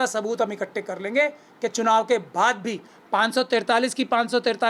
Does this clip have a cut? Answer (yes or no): no